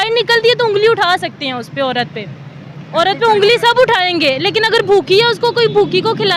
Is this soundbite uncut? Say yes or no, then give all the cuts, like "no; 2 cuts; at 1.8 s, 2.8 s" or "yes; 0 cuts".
yes; 0 cuts